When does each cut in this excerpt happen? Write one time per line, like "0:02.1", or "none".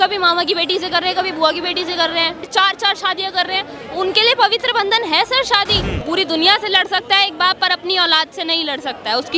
0:02.4
0:05.9

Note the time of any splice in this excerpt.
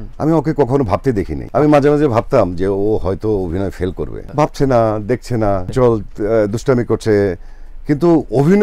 0:01.4
0:04.2
0:05.7

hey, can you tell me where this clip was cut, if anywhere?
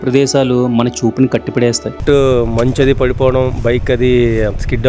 0:02.0

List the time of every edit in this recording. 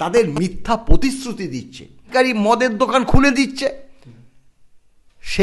0:02.1

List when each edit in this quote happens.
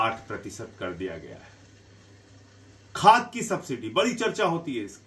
none

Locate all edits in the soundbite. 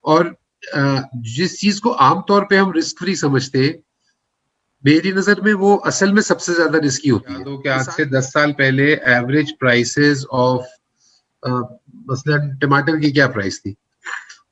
0:07.6

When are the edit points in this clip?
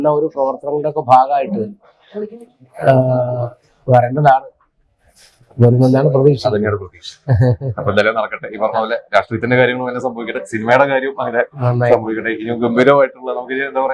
none

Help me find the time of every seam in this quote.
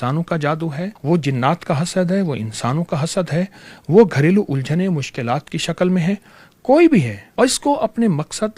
0:00.9
0:07.2

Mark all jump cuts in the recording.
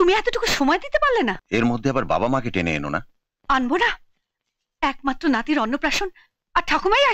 0:01.4

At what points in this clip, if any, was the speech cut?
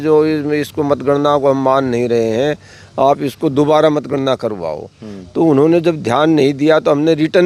none

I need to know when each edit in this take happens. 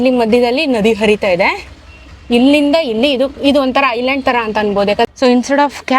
0:05.1

